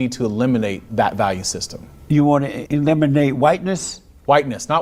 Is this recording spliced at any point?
yes; 2 cuts; at 0.8 s, 2.6 s

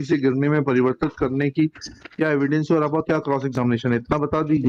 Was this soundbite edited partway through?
no; 0 cuts

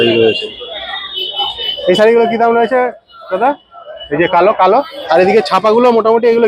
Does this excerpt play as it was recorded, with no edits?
no; 1 cut; at 5.0 s

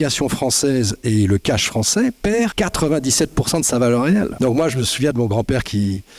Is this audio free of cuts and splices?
no; 2 cuts; at 2.5 s, 4.3 s

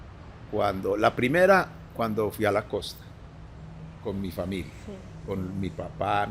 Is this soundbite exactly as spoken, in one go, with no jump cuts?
yes; 0 cuts

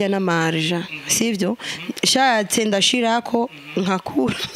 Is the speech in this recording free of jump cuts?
yes; 0 cuts

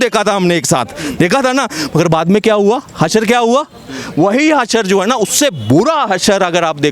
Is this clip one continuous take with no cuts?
yes; 0 cuts

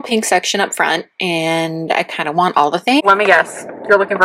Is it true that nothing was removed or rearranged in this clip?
no; 1 cut; at 3.0 s

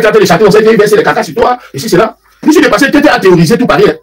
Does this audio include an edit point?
no; 0 cuts

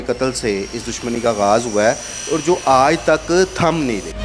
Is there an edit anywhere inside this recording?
no; 0 cuts

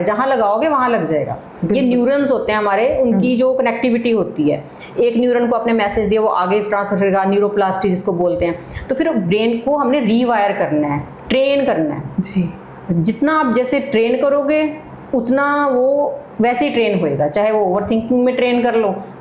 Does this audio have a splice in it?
no; 0 cuts

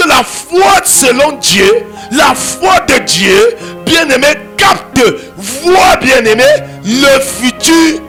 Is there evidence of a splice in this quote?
no; 0 cuts

